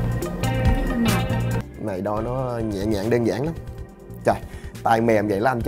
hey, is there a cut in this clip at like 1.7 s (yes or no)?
yes